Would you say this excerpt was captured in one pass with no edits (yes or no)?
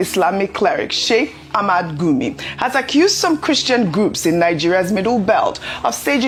yes